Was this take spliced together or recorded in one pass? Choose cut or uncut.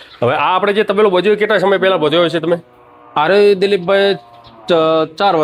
uncut